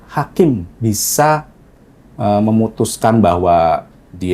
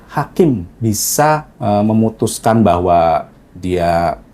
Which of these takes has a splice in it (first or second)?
second